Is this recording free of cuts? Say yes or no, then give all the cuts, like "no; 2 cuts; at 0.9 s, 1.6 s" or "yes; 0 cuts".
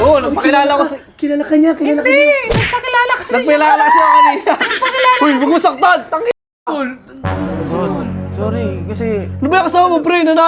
yes; 0 cuts